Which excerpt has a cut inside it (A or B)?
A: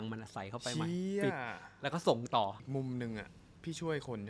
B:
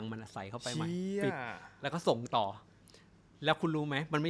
A